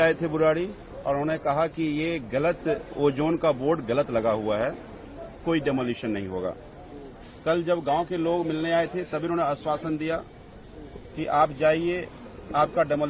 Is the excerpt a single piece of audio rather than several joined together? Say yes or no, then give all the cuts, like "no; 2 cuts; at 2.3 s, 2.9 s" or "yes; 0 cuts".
yes; 0 cuts